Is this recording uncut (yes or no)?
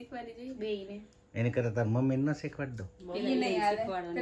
no